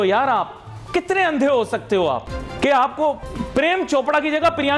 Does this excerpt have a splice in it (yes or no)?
yes